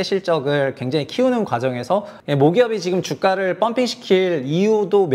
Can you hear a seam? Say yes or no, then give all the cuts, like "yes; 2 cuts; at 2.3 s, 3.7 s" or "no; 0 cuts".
yes; 1 cut; at 2.2 s